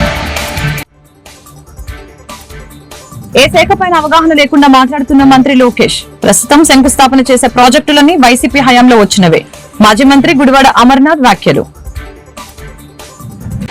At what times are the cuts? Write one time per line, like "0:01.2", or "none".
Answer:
none